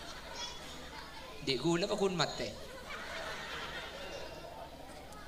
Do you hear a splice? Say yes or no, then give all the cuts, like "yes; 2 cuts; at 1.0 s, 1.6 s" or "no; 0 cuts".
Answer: no; 0 cuts